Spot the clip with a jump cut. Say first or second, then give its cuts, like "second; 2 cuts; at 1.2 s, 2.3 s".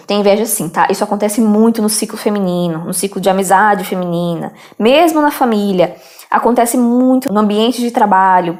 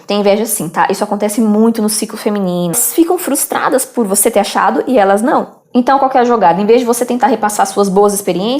second; 1 cut; at 2.8 s